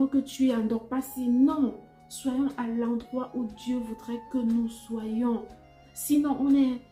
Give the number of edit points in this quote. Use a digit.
0